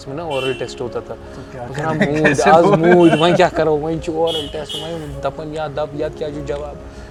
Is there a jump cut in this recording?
no; 0 cuts

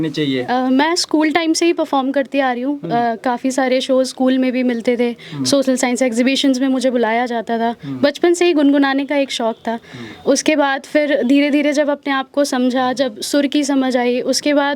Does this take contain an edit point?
no; 0 cuts

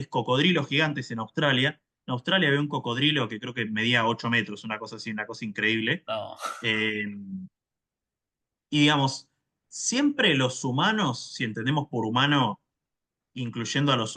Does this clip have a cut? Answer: no; 0 cuts

